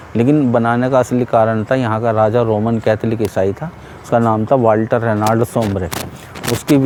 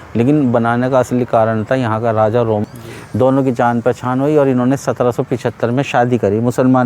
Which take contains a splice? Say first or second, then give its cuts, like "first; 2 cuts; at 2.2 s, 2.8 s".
second; 1 cut; at 2.6 s